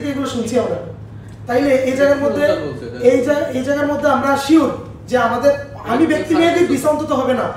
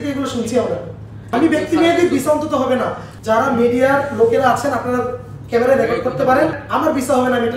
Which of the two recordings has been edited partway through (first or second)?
second